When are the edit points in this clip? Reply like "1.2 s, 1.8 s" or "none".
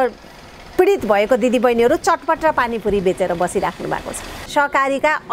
4.4 s

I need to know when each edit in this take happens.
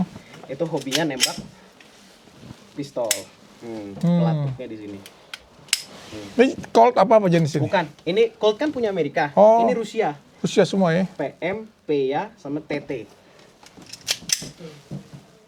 none

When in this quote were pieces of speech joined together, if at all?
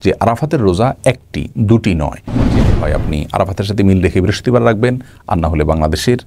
2.6 s

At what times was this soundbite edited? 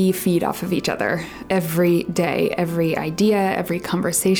none

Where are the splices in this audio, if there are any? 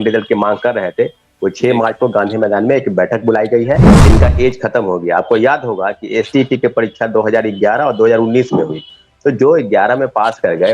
3.9 s

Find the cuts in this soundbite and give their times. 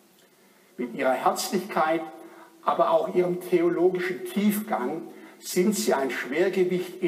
1.1 s

